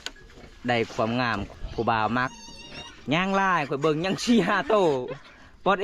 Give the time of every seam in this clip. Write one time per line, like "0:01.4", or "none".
0:01.5

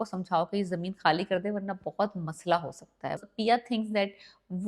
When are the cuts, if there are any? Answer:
0:03.2

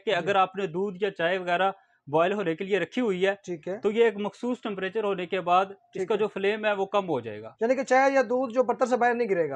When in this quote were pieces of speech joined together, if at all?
none

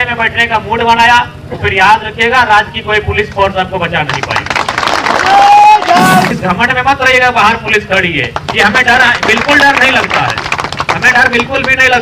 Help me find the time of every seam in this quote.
0:06.3

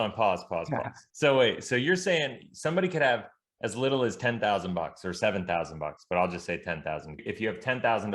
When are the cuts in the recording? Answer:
0:01.0
0:07.3

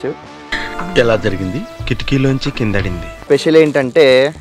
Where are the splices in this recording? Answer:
0:03.1

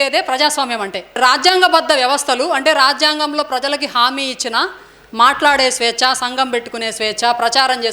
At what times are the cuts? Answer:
0:01.1

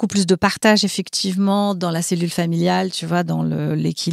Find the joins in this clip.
none

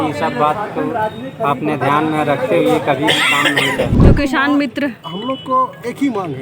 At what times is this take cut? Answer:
0:03.9

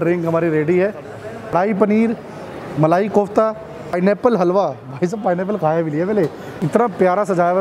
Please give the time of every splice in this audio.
0:01.5
0:03.9
0:06.5

